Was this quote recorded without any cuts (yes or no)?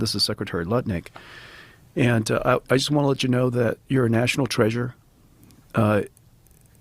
yes